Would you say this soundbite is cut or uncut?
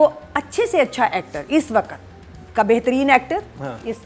uncut